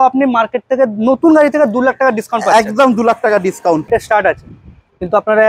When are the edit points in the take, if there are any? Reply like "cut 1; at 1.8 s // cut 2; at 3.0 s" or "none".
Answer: cut 1; at 3.9 s